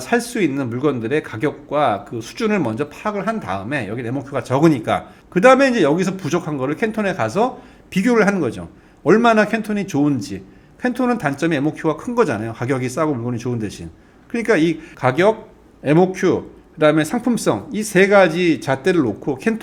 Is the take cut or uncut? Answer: uncut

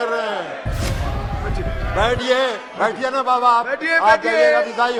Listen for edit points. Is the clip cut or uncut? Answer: uncut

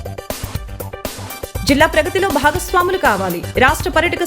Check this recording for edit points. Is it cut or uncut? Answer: cut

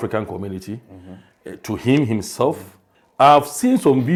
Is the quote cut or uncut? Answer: uncut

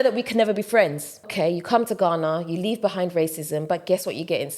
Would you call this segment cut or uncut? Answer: cut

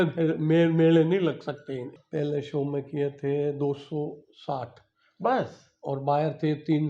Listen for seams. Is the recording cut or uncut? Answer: cut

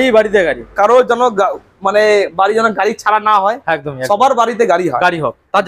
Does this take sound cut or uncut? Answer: uncut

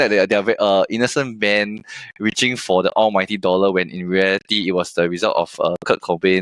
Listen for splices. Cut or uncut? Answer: uncut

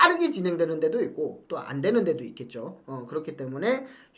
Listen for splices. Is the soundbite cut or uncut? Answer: uncut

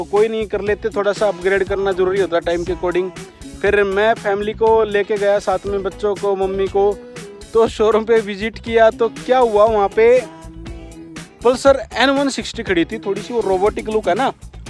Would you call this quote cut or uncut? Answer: uncut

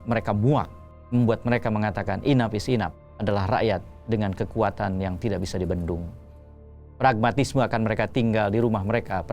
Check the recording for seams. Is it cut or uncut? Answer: uncut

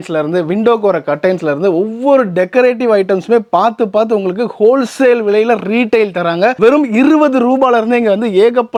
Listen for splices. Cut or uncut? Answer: uncut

